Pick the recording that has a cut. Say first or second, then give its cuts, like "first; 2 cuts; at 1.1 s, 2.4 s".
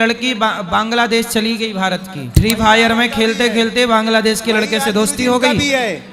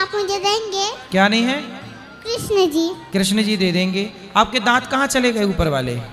first; 1 cut; at 2.2 s